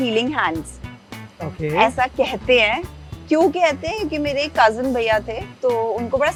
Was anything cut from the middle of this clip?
no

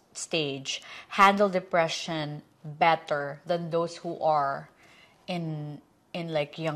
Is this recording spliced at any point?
no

